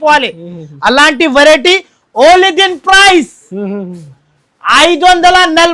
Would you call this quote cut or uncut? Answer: uncut